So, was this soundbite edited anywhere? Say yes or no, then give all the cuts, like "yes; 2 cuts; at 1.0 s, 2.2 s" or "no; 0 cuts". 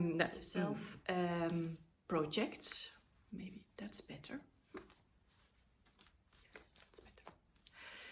no; 0 cuts